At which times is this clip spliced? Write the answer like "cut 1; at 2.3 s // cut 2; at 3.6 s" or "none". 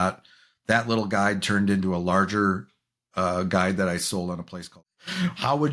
cut 1; at 4.6 s